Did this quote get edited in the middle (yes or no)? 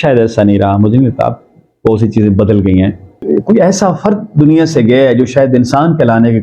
yes